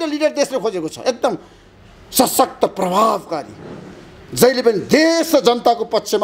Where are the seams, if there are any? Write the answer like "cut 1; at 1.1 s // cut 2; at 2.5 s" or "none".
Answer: none